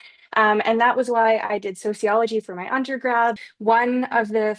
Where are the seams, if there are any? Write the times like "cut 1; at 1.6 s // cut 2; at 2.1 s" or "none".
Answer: cut 1; at 3.4 s